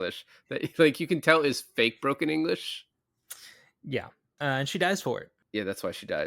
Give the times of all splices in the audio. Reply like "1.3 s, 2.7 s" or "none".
5.3 s